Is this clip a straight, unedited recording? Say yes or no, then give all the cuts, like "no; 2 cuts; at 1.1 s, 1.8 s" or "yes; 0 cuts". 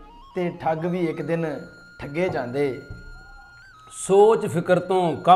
yes; 0 cuts